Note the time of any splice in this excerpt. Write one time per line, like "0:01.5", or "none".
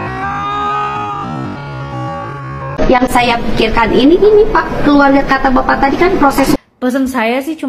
0:02.8
0:06.6